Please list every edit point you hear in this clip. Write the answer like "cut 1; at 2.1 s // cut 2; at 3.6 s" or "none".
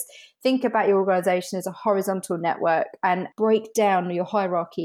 cut 1; at 3.3 s